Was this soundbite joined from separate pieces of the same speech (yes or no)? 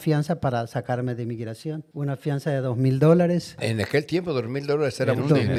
no